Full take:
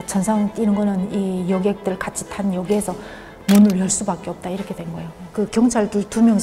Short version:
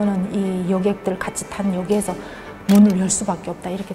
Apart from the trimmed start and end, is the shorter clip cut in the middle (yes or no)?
no